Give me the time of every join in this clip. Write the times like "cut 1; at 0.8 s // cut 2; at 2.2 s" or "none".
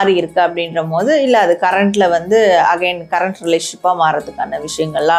none